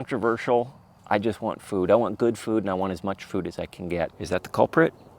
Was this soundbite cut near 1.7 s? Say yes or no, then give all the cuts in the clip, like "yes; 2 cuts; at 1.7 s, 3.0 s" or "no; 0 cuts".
no; 1 cut; at 4.2 s